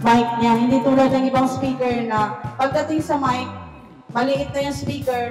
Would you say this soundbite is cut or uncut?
uncut